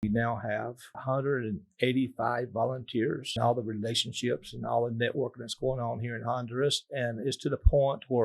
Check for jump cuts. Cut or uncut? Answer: cut